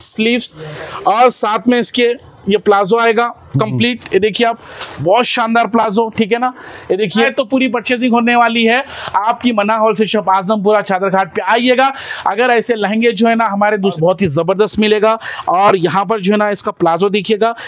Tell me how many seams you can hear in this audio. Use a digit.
2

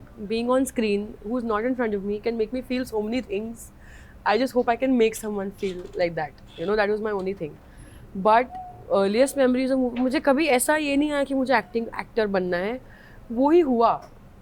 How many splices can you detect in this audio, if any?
0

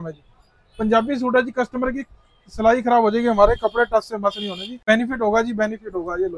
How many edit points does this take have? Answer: 1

